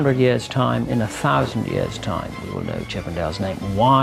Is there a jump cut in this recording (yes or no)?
no